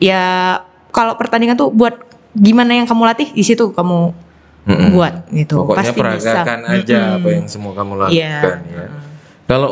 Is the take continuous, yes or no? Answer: yes